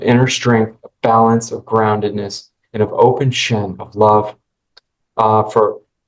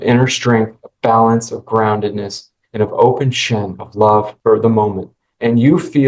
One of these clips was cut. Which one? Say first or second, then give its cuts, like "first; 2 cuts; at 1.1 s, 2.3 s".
second; 1 cut; at 4.3 s